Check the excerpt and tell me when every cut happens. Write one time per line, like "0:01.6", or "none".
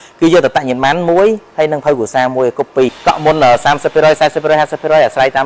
0:03.0